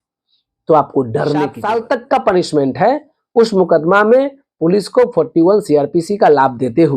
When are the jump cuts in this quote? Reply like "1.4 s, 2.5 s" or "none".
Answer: 1.6 s